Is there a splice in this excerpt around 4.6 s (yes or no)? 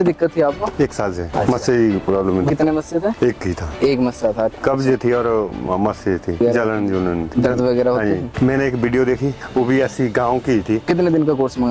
yes